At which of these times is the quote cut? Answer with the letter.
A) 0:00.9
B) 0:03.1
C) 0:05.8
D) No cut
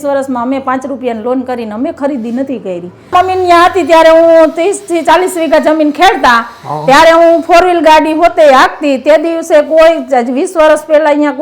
B